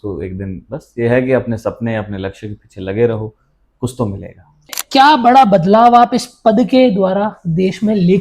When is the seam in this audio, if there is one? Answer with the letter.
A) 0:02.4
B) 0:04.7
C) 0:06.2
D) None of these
B